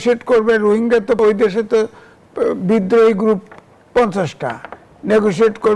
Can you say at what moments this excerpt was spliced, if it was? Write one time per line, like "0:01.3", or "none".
0:01.2